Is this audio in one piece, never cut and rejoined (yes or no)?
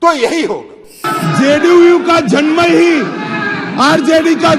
no